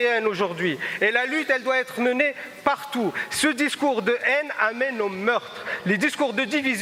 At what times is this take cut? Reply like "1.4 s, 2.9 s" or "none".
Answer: none